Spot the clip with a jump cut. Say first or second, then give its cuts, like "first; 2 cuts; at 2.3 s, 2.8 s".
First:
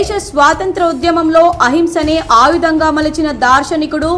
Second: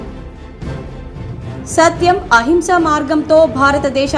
second; 1 cut; at 1.5 s